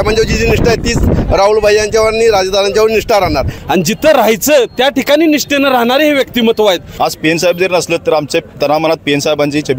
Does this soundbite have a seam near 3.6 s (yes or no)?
yes